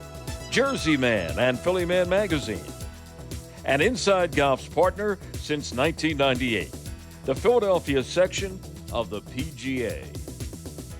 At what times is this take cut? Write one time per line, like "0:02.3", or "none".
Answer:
0:10.0